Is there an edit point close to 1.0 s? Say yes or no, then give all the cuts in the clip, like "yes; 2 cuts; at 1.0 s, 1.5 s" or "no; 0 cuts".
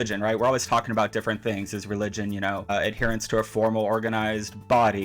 no; 1 cut; at 2.7 s